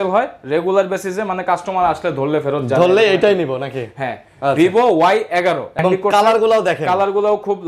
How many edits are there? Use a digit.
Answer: 1